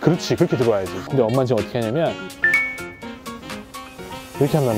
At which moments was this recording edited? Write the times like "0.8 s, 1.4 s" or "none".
1.0 s